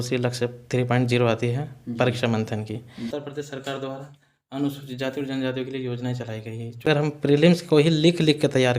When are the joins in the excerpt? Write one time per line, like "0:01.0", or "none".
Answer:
0:03.0
0:06.9